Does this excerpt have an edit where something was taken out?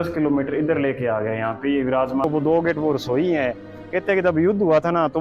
yes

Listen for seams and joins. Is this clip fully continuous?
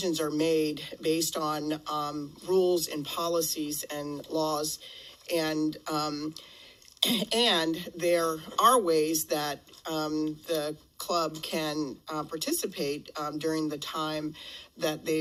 yes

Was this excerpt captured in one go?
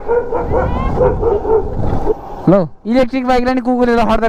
no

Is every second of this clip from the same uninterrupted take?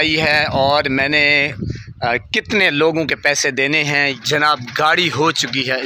no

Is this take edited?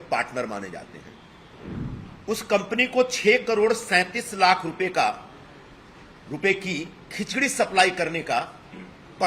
yes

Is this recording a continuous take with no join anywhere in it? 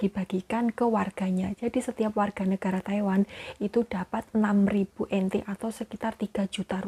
yes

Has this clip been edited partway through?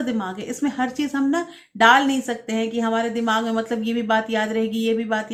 no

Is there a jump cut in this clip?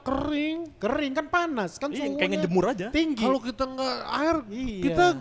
no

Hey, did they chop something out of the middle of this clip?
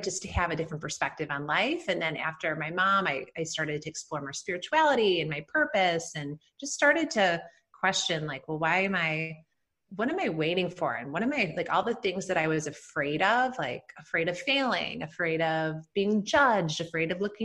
no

